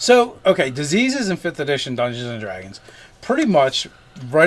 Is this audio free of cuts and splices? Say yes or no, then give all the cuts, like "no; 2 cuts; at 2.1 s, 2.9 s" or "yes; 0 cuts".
no; 1 cut; at 3.4 s